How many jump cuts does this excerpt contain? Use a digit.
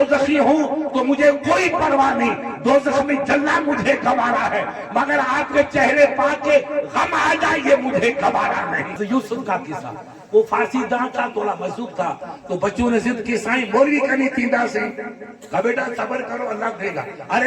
1